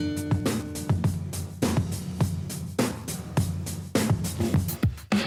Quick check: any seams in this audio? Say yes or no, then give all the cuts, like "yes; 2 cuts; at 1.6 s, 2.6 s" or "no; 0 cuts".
no; 0 cuts